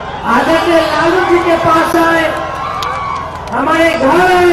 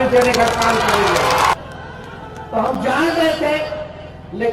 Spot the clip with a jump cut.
second; 1 cut; at 1.5 s

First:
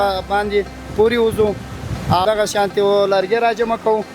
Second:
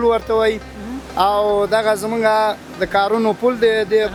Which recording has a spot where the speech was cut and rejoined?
first; 1 cut; at 2.2 s

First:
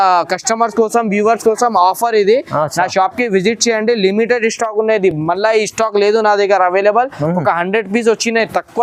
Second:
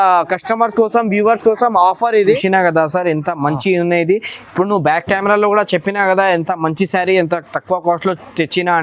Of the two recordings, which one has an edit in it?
second; 1 cut; at 2.4 s

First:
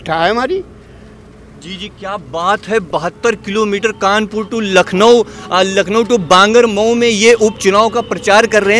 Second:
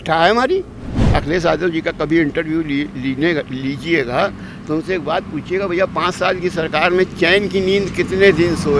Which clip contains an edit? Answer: second; 1 cut; at 1.0 s

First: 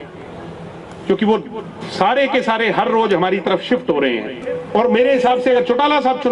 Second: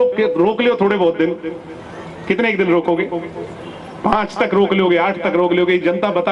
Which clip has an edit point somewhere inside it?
first; 1 cut; at 4.5 s

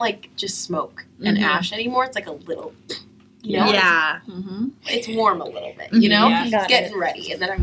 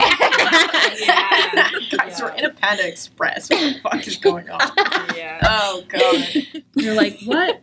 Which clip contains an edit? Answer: second; 1 cut; at 6.5 s

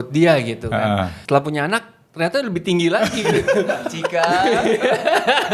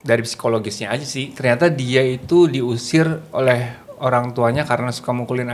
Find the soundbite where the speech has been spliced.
first; 1 cut; at 1.2 s

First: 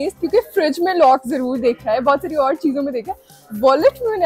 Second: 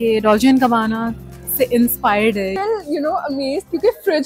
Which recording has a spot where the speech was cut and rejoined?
second; 1 cut; at 2.6 s

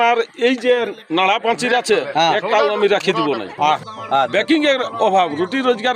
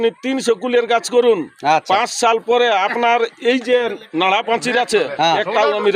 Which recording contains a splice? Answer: first; 1 cut; at 3.9 s

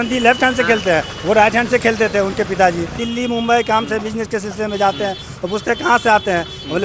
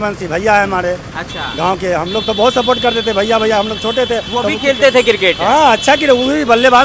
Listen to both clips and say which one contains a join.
first; 1 cut; at 3.0 s

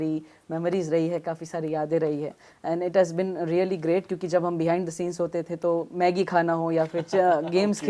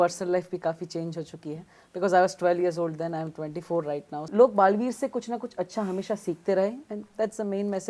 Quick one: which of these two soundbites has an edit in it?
second; 1 cut; at 4.1 s

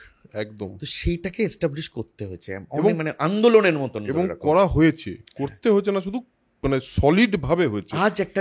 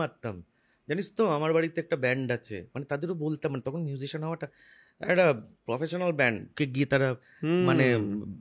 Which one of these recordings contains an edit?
second; 1 cut; at 6.5 s

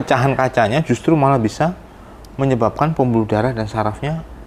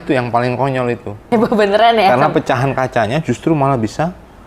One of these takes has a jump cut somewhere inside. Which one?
second; 1 cut; at 1.2 s

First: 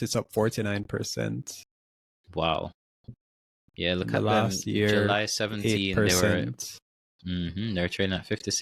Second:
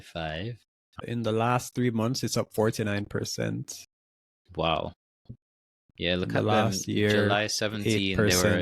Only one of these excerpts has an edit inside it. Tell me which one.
second; 1 cut; at 1.1 s

